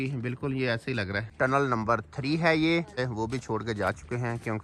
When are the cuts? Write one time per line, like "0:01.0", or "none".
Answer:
0:01.2
0:03.0